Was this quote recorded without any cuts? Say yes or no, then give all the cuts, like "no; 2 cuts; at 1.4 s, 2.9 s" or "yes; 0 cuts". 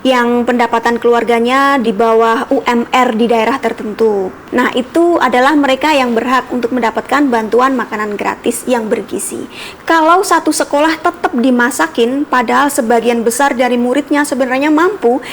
no; 2 cuts; at 1.8 s, 4.4 s